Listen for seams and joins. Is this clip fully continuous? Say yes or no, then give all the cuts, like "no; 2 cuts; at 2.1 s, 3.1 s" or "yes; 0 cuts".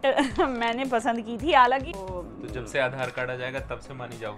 no; 1 cut; at 1.9 s